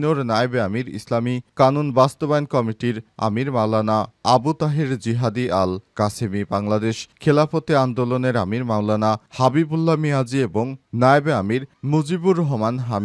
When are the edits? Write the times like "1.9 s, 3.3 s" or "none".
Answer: none